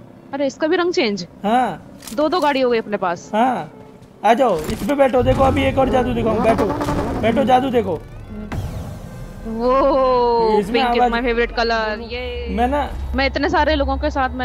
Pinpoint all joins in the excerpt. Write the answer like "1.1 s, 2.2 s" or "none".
12.1 s